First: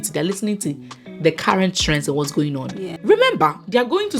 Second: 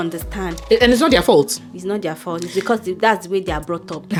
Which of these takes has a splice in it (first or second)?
first